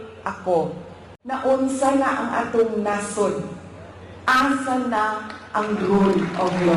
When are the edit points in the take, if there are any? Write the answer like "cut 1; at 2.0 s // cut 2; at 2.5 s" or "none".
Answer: cut 1; at 1.1 s